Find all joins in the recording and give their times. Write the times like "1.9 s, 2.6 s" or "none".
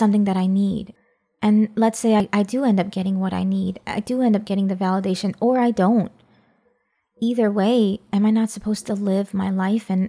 0.9 s, 2.2 s